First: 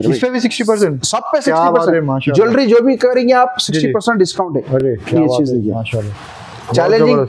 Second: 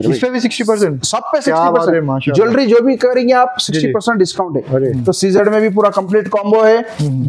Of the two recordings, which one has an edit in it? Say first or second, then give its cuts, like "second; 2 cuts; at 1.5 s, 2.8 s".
second; 1 cut; at 4.9 s